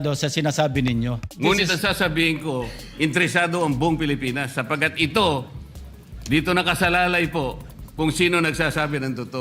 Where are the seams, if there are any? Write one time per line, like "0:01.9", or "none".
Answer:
0:01.3